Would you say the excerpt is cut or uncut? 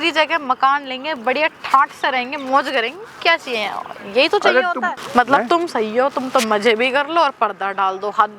cut